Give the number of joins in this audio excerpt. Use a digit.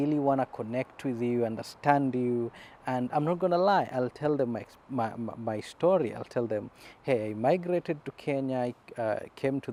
0